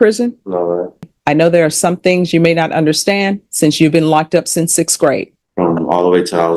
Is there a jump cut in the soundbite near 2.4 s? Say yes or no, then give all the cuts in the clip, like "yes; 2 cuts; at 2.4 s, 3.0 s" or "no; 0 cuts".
no; 2 cuts; at 1.1 s, 5.4 s